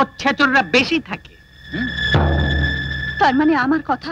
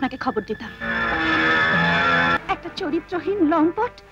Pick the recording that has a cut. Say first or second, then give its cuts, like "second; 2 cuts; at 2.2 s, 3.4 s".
second; 1 cut; at 2.4 s